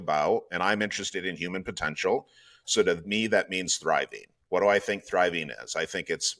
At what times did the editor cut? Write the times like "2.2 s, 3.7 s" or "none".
none